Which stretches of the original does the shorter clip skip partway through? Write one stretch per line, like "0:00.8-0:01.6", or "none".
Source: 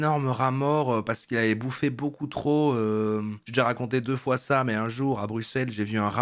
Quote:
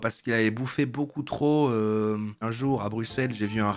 0:03.5-0:04.8

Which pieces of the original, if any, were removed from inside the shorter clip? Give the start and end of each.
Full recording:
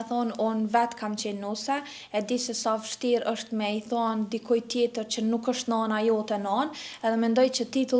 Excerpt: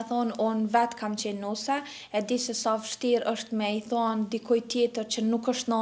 none

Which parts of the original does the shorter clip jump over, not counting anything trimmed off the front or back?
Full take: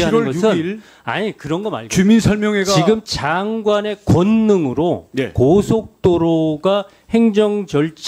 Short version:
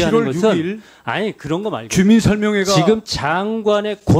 none

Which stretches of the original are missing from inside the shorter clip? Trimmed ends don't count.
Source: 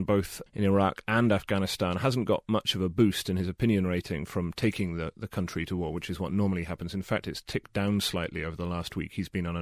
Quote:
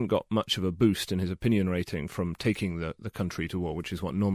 none

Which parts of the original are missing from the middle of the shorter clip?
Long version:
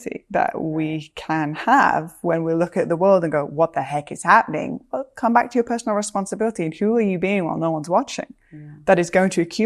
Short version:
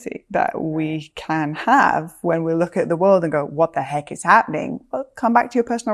none

